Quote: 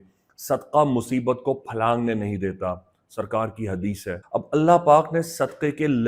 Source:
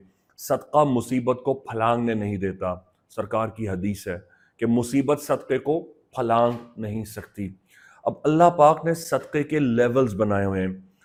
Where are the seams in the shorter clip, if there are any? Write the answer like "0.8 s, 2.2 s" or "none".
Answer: 4.2 s